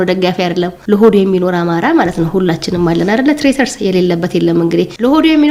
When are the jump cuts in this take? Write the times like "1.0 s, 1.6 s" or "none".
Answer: none

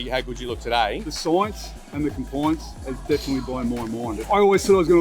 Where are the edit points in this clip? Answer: 1.1 s, 4.2 s

